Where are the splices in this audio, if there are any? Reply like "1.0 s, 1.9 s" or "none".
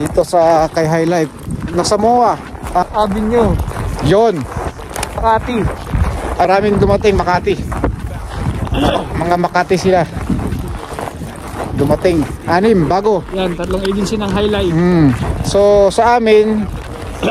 1.7 s, 2.8 s, 5.2 s, 6.5 s